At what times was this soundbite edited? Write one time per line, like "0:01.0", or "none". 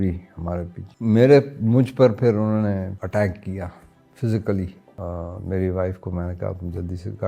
0:03.0
0:04.8